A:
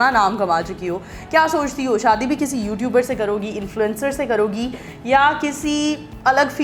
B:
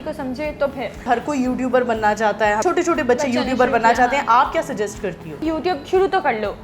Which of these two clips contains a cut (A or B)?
B